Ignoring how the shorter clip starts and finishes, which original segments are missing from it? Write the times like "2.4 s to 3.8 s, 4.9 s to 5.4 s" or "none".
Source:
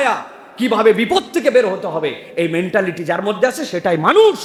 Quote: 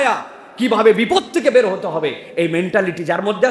none